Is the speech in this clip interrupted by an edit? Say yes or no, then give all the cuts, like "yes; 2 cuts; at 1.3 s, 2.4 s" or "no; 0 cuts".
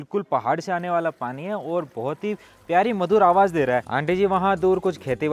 no; 0 cuts